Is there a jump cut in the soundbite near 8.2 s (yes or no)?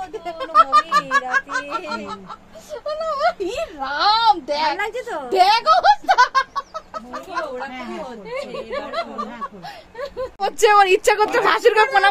no